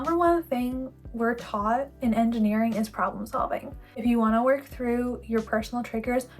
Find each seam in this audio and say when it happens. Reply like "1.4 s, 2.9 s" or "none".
3.8 s